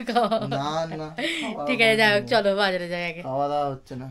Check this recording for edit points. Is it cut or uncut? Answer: uncut